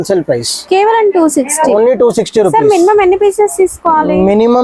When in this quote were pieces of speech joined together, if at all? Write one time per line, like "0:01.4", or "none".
none